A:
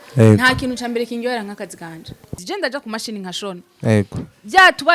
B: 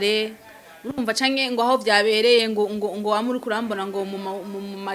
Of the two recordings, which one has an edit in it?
A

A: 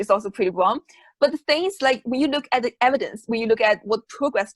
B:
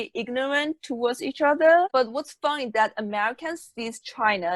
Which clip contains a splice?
B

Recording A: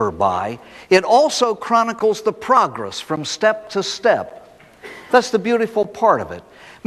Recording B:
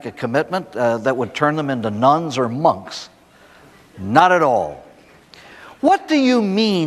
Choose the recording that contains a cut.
A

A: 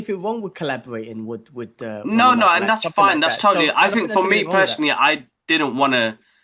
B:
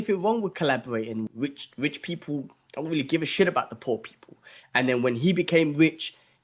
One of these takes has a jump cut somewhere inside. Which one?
B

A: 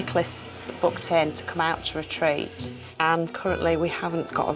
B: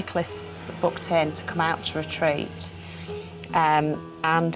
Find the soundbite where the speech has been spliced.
A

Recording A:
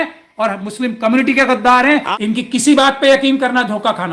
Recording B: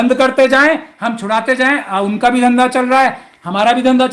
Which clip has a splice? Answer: A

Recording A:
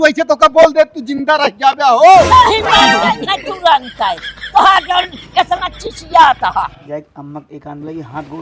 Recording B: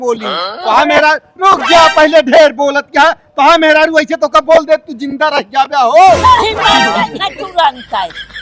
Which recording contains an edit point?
A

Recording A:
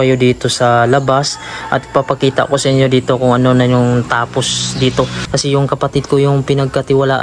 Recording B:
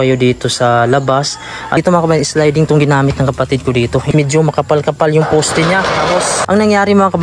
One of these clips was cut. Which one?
B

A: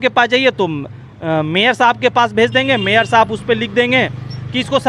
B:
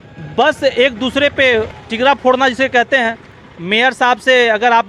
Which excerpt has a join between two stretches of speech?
B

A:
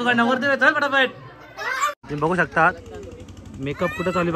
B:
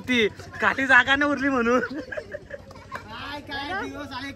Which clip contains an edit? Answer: A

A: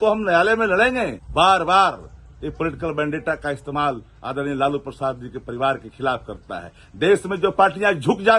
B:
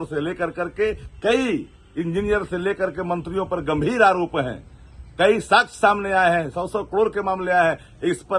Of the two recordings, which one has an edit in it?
A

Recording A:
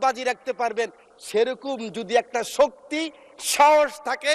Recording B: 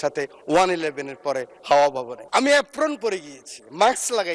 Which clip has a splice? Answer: B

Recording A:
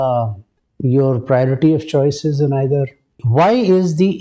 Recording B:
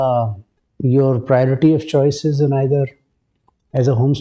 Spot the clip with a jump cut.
A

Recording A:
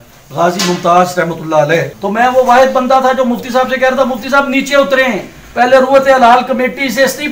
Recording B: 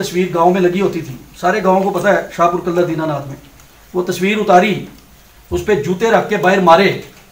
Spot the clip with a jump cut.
A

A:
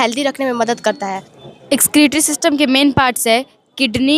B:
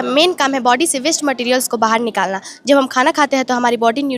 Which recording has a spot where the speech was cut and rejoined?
A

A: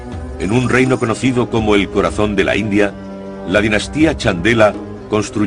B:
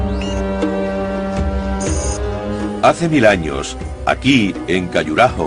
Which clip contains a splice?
A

